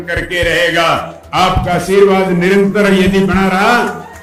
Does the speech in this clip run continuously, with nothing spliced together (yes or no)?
yes